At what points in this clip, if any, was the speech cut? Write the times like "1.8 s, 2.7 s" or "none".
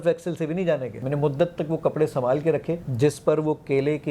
1.0 s, 2.8 s